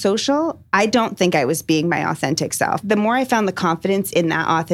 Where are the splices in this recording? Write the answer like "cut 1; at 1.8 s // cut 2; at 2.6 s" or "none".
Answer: cut 1; at 2.8 s